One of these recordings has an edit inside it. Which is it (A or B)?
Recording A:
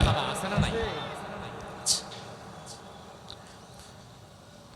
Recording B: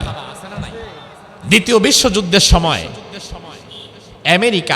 B